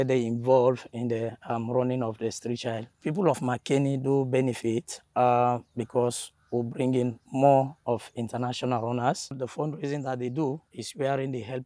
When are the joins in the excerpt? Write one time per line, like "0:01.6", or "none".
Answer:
0:02.9
0:09.4